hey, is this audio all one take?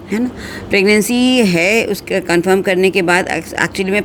yes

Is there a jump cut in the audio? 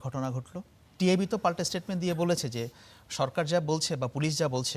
yes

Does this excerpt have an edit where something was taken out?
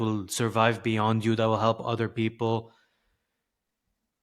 no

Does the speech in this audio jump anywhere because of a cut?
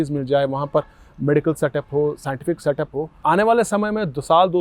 yes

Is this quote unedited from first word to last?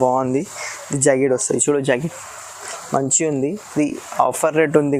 yes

